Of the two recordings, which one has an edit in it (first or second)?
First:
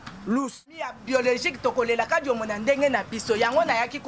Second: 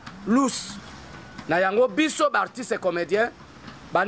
first